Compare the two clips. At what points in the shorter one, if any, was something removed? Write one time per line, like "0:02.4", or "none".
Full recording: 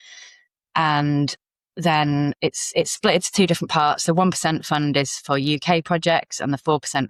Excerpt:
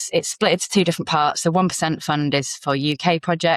none